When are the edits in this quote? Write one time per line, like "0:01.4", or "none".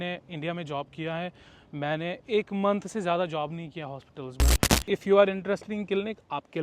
0:04.7